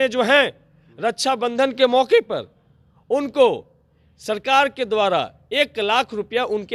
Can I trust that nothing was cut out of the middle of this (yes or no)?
yes